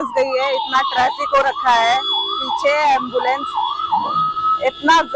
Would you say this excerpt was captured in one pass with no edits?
yes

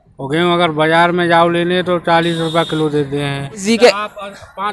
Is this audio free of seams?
no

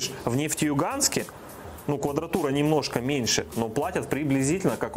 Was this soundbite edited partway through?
no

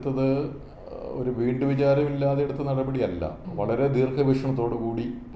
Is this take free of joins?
yes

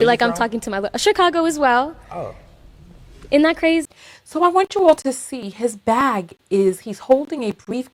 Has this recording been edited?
no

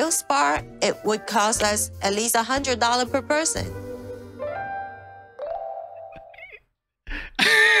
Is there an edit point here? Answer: no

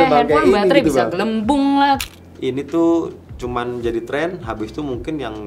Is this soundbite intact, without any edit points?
no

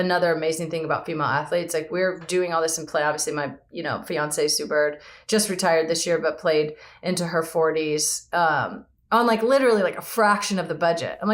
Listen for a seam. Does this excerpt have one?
no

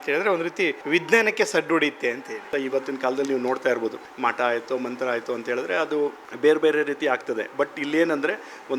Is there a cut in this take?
yes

